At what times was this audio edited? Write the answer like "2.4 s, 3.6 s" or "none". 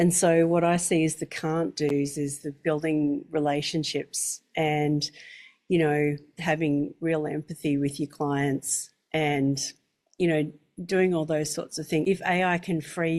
none